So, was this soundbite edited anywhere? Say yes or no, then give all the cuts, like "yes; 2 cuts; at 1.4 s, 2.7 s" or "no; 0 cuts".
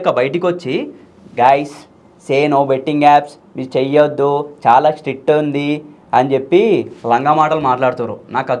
no; 0 cuts